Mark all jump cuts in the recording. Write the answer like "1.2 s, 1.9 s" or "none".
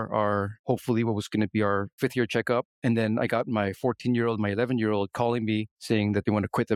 none